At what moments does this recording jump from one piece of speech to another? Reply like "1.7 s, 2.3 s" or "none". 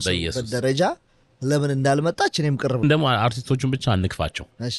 2.8 s